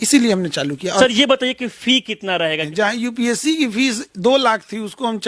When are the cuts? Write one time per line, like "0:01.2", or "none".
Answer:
0:01.0
0:02.7